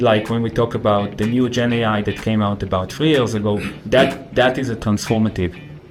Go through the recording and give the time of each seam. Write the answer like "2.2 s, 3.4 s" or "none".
none